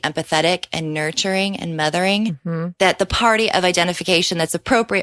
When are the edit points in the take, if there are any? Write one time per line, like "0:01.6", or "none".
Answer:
none